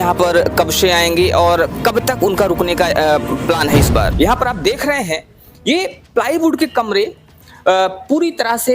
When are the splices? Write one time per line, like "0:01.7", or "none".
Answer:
0:04.1